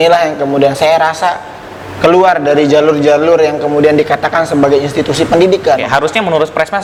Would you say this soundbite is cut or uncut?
uncut